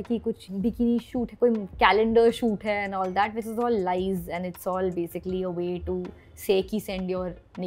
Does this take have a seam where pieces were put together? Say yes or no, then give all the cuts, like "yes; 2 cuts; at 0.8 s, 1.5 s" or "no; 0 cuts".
no; 0 cuts